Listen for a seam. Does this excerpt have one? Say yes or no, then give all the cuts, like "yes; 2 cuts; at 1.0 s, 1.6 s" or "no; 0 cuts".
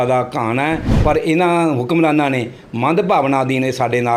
yes; 1 cut; at 0.9 s